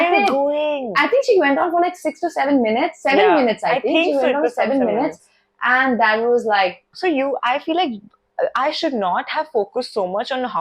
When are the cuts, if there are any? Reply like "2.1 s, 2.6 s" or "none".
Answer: 6.9 s